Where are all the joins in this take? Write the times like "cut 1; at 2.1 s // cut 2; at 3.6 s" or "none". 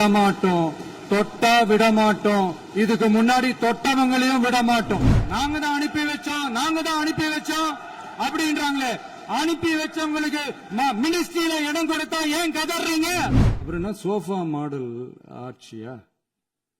cut 1; at 5.1 s // cut 2; at 13.5 s